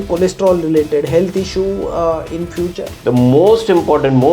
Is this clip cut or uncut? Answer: cut